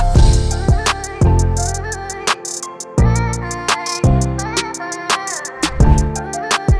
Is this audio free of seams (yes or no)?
yes